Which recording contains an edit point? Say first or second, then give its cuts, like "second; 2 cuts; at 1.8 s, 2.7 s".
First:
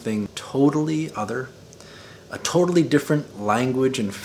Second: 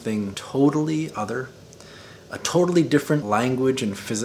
second; 1 cut; at 3.2 s